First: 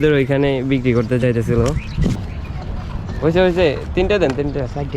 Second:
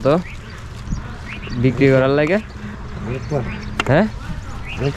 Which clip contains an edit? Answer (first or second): first